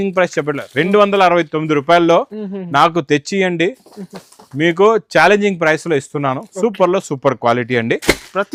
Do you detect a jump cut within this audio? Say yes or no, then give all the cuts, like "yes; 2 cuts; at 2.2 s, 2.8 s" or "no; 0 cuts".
no; 0 cuts